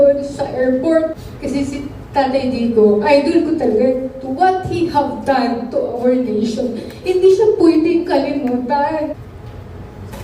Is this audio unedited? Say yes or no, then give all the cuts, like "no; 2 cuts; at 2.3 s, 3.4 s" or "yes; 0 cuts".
no; 2 cuts; at 1.3 s, 9.1 s